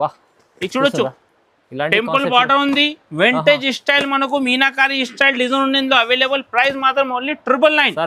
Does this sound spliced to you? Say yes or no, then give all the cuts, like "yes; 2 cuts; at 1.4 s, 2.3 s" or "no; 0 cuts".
no; 0 cuts